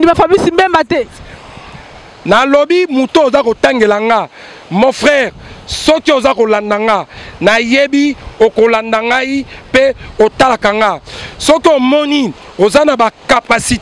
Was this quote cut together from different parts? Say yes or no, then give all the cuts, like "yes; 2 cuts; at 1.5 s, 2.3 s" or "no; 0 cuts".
no; 0 cuts